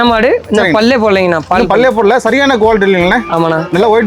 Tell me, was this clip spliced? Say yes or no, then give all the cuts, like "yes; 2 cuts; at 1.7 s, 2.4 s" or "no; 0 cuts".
no; 0 cuts